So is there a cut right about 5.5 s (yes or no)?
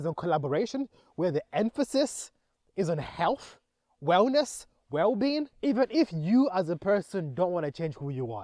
yes